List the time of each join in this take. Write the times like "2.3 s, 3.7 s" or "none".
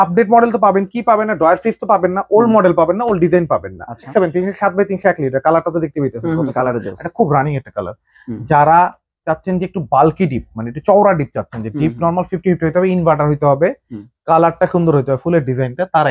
4.1 s